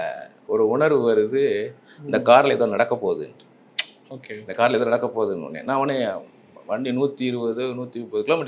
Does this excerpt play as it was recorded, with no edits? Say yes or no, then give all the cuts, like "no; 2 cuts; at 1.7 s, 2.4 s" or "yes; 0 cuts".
yes; 0 cuts